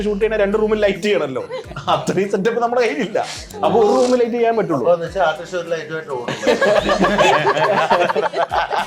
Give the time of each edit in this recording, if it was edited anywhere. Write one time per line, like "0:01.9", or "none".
none